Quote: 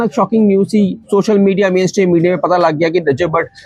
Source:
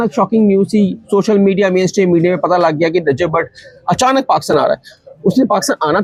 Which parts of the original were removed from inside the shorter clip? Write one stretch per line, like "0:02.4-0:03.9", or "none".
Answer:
none

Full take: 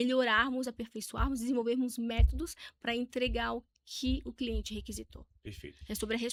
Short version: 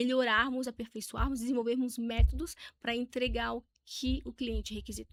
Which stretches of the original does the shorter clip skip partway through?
none

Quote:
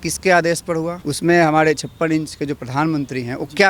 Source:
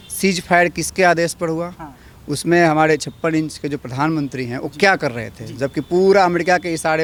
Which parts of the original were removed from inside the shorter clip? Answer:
0:01.7-0:02.2

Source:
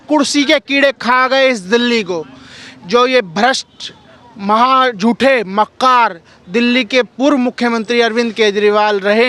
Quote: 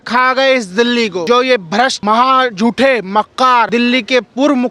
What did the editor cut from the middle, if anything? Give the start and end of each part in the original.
0:02.2-0:02.9
0:03.6-0:04.4
0:06.1-0:06.5

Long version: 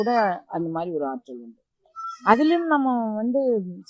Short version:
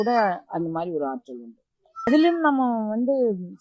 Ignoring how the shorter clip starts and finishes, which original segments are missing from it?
0:02.1-0:02.3

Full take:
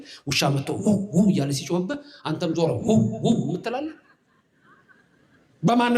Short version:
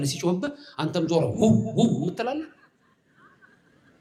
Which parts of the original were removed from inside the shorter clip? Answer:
none

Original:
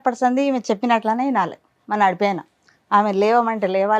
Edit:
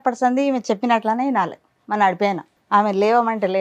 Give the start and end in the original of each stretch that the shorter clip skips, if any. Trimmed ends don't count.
0:02.5-0:02.7

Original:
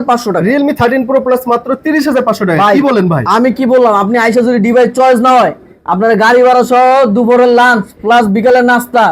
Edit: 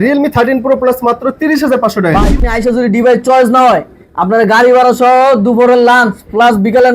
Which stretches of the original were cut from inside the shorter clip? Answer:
0:02.8-0:04.0

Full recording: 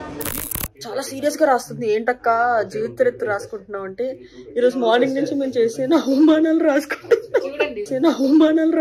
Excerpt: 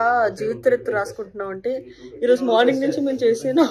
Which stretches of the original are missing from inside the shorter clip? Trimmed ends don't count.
none

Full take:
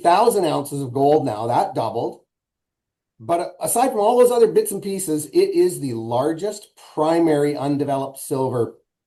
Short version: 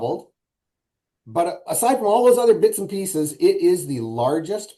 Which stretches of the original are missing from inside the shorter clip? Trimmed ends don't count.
none

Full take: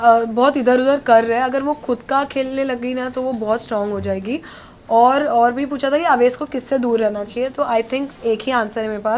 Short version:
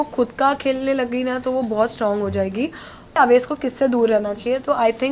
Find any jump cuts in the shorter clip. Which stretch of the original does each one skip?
0:04.8-0:06.0

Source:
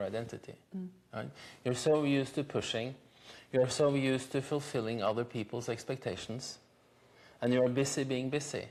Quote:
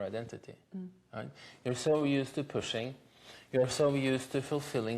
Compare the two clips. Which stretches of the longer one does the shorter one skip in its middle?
none

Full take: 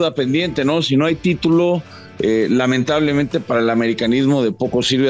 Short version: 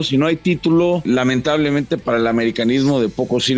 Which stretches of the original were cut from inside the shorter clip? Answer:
0:01.8-0:02.5

